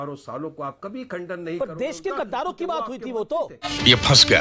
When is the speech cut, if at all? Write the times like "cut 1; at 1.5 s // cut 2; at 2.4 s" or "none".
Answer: none